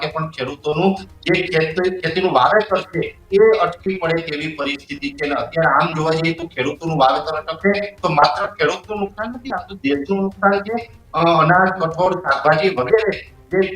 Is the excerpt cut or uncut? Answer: uncut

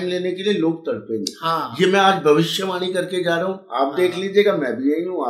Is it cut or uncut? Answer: uncut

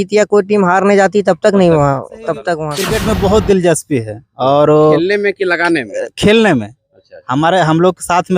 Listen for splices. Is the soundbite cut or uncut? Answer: cut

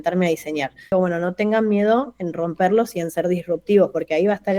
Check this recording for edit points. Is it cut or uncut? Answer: cut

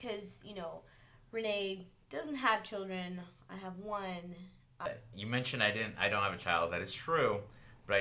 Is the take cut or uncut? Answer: cut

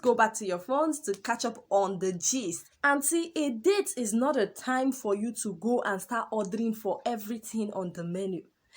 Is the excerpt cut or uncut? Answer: cut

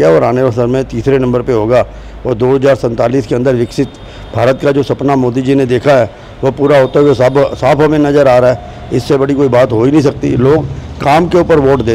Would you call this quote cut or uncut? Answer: uncut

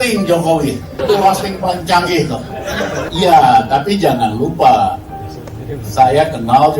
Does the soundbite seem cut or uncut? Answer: cut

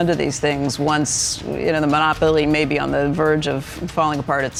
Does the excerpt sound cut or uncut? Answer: uncut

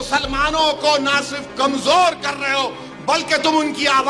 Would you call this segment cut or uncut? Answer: uncut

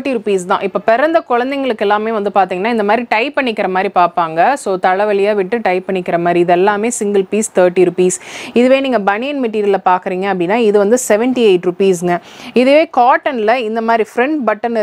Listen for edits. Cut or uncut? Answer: uncut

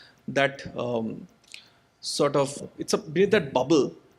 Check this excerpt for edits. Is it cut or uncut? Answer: cut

